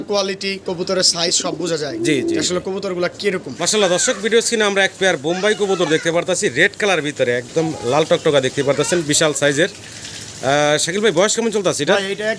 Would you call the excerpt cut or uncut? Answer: cut